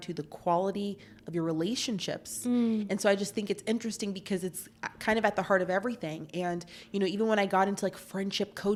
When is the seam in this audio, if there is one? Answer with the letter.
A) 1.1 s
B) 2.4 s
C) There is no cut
C